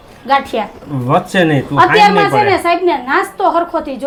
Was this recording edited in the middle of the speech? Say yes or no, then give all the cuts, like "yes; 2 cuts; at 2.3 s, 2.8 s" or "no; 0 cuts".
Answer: no; 0 cuts